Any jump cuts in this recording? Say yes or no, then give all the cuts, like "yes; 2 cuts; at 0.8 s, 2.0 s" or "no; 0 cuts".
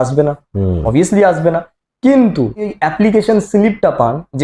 yes; 1 cut; at 2.8 s